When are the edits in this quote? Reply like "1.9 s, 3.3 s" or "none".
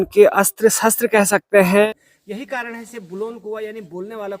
1.9 s